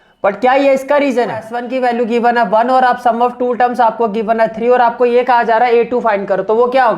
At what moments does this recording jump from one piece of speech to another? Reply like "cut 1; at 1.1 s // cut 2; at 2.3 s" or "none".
cut 1; at 1.6 s